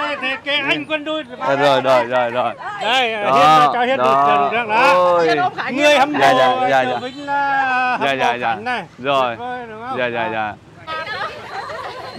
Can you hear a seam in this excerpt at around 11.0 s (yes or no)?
yes